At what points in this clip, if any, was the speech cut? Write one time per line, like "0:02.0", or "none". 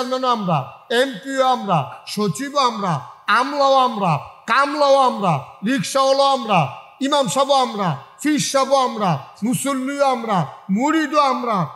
none